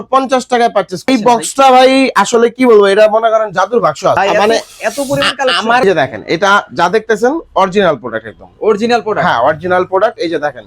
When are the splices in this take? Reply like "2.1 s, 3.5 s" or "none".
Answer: 1.1 s, 4.2 s, 5.8 s